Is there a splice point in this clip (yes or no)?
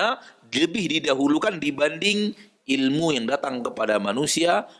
no